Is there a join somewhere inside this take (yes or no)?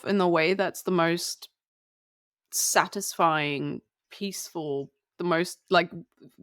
no